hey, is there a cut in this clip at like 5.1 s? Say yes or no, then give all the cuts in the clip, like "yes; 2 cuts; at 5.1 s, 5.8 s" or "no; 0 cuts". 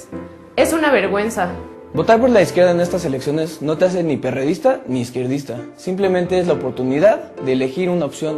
no; 0 cuts